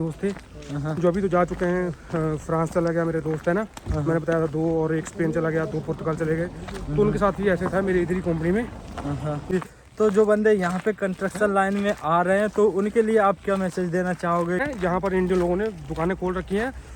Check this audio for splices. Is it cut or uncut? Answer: cut